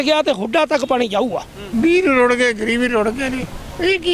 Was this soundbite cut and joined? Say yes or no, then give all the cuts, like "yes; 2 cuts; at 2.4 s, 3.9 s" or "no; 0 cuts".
yes; 1 cut; at 1.7 s